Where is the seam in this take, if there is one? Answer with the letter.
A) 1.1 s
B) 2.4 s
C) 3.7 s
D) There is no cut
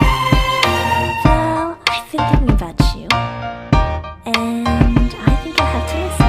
A